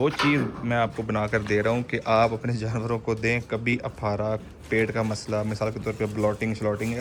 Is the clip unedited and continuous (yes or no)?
yes